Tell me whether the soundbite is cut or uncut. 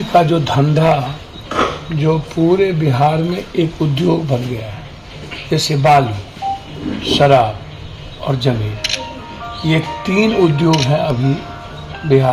uncut